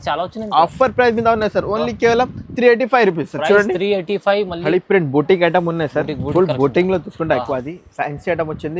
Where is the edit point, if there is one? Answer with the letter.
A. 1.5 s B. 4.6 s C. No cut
B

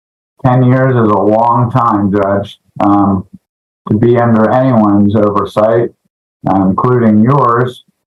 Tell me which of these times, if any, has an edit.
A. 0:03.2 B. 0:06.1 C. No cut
C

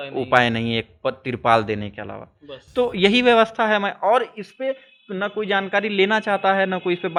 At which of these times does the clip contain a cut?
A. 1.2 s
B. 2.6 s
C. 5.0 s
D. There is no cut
D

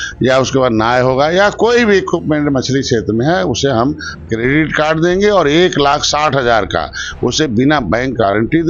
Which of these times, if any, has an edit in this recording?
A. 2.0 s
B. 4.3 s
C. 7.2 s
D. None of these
D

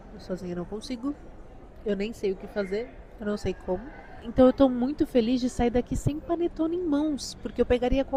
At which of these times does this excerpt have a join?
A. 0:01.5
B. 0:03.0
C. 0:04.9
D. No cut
D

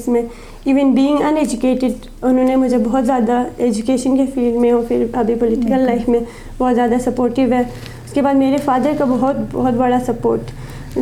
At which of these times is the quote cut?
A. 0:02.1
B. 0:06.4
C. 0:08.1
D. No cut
D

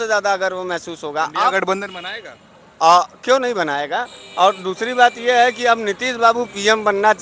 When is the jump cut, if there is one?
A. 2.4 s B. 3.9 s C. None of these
C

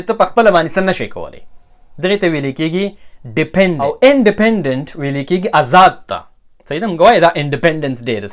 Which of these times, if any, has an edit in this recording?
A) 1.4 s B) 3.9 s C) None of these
B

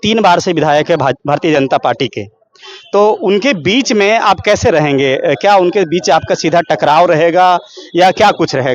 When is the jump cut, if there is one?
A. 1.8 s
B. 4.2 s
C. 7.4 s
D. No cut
D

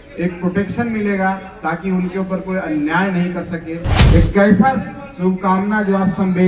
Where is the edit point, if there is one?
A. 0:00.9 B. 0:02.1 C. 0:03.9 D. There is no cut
C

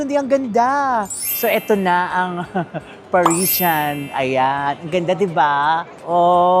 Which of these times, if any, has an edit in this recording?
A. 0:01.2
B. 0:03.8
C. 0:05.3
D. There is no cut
A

